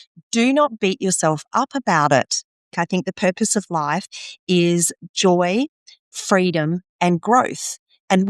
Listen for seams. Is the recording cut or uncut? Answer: cut